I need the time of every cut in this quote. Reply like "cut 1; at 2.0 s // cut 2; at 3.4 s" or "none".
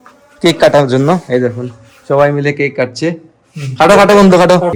none